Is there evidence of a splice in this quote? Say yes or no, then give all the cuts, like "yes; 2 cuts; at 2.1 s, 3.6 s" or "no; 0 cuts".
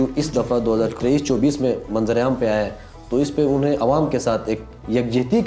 no; 0 cuts